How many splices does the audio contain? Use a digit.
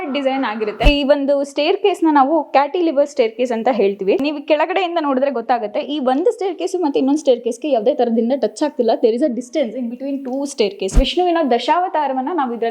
2